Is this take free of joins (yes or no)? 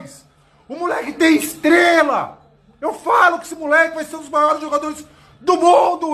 yes